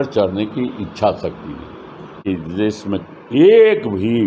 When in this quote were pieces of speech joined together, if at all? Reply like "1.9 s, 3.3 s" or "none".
2.2 s

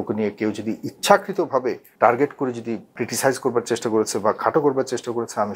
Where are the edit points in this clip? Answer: 1.9 s, 3.0 s

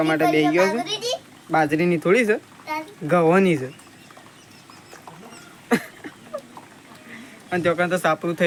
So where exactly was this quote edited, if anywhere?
none

